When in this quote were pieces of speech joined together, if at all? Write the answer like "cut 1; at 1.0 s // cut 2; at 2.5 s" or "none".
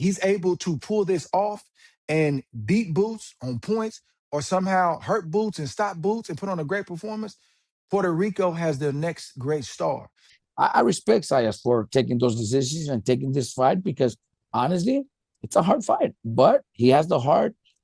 cut 1; at 10.3 s